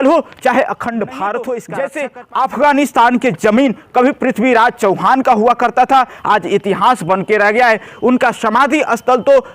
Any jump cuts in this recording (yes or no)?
yes